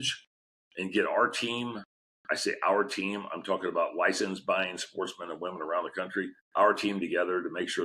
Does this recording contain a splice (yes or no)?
yes